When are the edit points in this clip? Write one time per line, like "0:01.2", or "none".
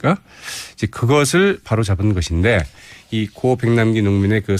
none